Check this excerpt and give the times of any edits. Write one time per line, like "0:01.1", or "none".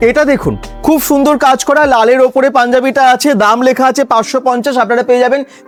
none